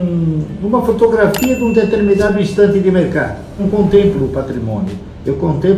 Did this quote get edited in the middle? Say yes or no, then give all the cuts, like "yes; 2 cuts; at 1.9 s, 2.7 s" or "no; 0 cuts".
yes; 1 cut; at 3.6 s